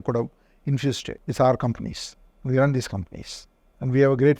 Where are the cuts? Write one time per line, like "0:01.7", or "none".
0:01.1